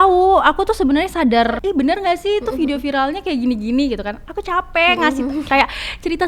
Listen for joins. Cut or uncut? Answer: cut